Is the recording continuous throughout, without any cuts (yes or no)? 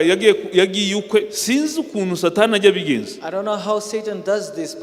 yes